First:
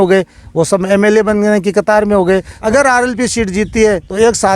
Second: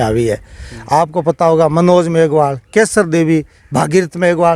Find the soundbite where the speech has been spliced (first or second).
first